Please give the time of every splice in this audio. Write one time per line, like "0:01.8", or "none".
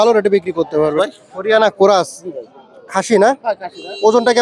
0:00.9